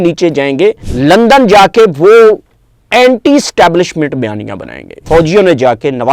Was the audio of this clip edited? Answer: yes; 2 cuts; at 0.9 s, 4.9 s

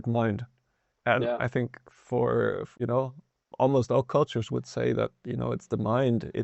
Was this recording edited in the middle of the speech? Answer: yes; 1 cut; at 2.7 s

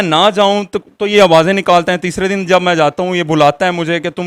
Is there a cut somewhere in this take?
no; 0 cuts

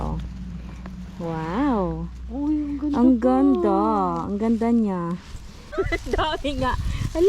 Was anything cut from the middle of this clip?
yes; 1 cut; at 5.7 s

